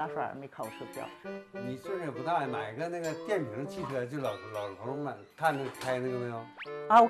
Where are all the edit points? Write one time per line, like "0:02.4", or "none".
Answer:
none